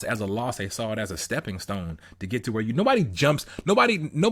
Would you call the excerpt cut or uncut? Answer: uncut